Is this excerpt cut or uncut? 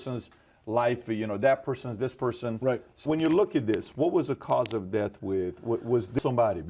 cut